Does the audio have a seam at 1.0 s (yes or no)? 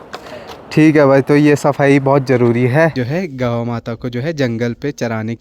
no